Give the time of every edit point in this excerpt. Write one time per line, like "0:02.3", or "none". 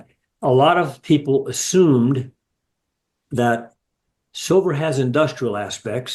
none